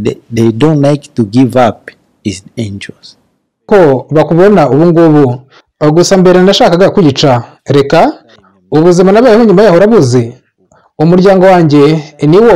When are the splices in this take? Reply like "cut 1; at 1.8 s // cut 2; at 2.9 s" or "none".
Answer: cut 1; at 3.7 s